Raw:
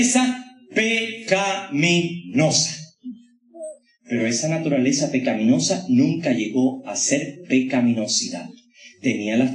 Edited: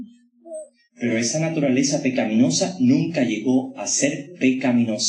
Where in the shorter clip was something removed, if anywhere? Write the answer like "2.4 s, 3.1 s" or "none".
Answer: none